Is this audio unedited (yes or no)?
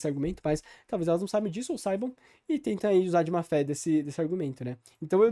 yes